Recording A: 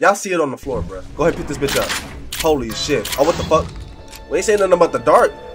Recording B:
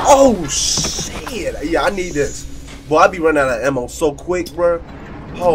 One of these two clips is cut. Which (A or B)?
A